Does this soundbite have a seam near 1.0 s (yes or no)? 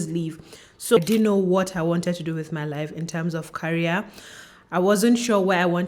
yes